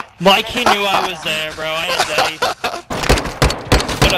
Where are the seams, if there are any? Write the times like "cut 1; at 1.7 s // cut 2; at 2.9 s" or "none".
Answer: cut 1; at 2.9 s